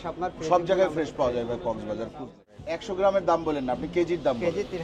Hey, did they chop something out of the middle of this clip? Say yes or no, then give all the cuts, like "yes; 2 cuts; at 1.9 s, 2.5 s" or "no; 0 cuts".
yes; 1 cut; at 2.5 s